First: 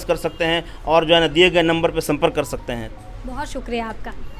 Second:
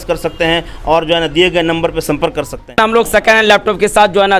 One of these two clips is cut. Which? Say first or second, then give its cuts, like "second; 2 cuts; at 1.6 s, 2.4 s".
second; 1 cut; at 2.8 s